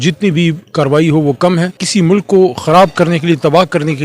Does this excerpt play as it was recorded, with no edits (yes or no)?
no